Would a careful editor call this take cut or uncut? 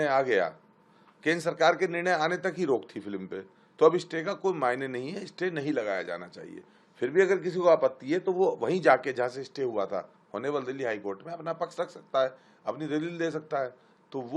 uncut